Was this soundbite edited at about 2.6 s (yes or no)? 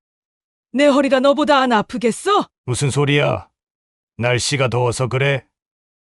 yes